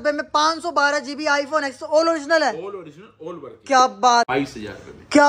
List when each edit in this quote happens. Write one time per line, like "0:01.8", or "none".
0:04.3